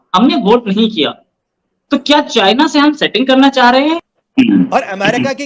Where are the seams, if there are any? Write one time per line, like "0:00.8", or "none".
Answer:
0:04.0